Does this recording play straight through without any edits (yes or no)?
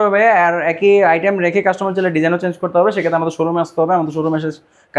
yes